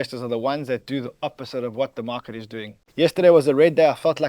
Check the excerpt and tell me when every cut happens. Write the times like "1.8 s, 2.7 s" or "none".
2.8 s